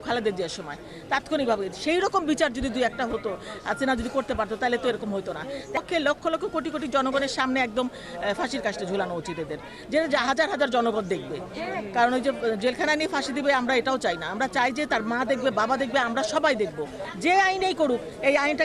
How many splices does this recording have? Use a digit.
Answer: 2